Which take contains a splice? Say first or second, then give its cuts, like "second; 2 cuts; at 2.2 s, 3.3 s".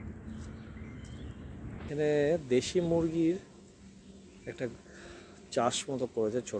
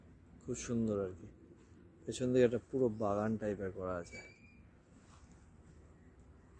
first; 1 cut; at 1.9 s